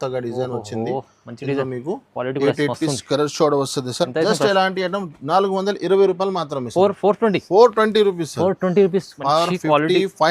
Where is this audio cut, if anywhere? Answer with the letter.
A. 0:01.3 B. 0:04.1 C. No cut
B